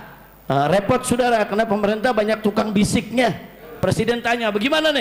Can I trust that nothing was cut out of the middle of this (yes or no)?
no